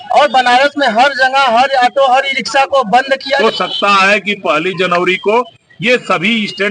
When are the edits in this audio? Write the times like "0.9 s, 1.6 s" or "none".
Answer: 3.4 s